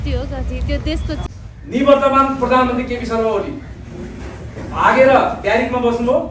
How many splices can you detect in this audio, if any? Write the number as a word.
one